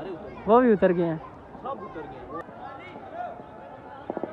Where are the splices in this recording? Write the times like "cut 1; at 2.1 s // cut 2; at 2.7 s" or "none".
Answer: cut 1; at 2.4 s